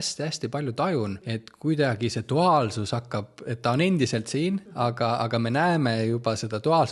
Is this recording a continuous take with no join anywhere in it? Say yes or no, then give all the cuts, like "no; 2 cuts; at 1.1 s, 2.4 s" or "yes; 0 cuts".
no; 2 cuts; at 1.4 s, 4.9 s